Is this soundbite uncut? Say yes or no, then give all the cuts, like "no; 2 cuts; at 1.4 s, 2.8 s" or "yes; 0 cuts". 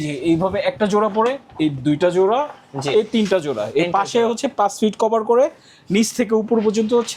yes; 0 cuts